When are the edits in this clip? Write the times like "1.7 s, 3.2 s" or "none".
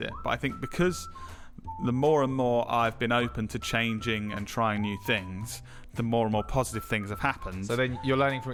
none